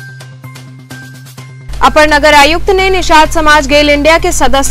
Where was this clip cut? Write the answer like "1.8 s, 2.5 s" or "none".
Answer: 1.6 s